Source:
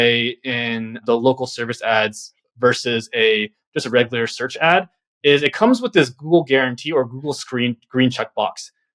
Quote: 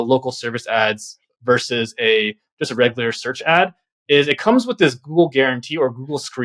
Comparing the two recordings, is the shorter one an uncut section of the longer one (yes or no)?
yes